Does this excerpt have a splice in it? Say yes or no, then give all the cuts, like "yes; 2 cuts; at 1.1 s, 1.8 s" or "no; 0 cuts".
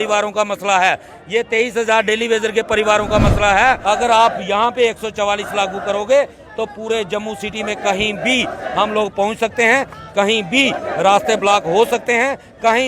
yes; 1 cut; at 3.8 s